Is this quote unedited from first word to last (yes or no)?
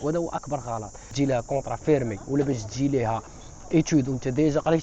no